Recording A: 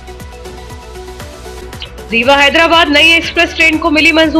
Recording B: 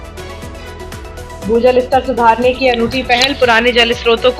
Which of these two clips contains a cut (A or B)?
B